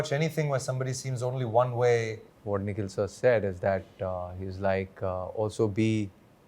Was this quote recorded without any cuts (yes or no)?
no